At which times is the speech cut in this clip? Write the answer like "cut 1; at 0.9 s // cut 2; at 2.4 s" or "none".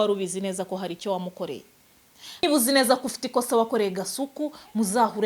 cut 1; at 2.4 s